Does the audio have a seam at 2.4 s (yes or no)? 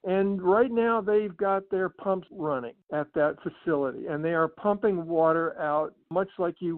yes